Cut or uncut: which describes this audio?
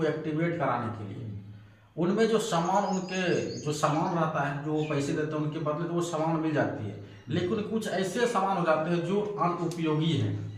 uncut